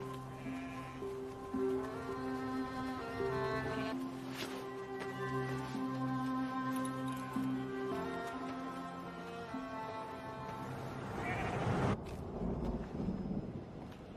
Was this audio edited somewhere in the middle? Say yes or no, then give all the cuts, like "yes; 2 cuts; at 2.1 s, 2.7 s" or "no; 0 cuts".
yes; 1 cut; at 12.0 s